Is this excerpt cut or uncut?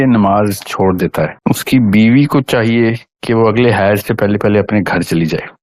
uncut